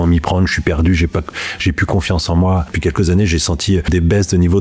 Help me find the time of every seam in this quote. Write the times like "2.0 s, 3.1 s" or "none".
2.7 s, 3.9 s